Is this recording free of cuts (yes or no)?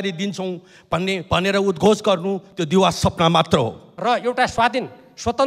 no